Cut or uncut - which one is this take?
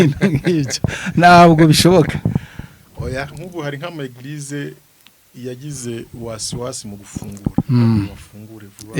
cut